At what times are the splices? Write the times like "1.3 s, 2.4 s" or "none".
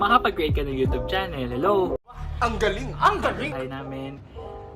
3.5 s